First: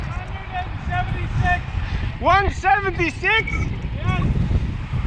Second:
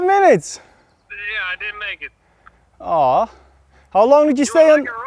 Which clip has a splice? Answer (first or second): second